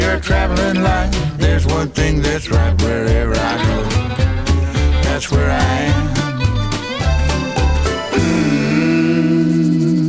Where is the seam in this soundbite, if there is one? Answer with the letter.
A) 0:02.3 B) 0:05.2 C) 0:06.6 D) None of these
D